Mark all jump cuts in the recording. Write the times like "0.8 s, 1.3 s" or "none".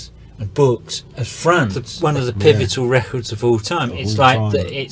1.8 s